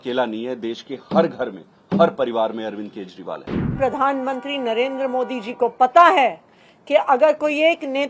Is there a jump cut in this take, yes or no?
yes